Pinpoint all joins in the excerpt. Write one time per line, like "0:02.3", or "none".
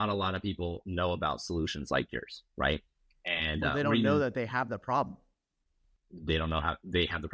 none